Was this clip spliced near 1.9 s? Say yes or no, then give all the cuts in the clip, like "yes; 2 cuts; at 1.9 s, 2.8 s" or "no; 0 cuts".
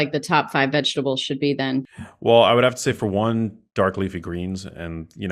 yes; 1 cut; at 1.9 s